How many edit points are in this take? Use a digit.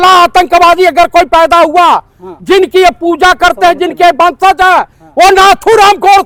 0